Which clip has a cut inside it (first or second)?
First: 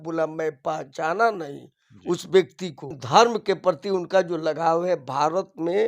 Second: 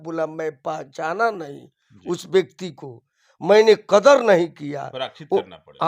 first